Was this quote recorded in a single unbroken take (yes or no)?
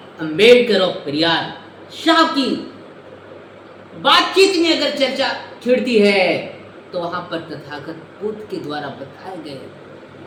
yes